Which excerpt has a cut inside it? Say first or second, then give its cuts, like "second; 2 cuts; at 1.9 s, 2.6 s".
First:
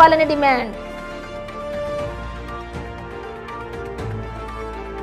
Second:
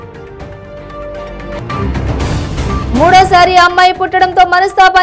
second; 1 cut; at 1.6 s